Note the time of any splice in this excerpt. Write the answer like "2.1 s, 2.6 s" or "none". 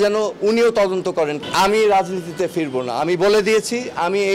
1.4 s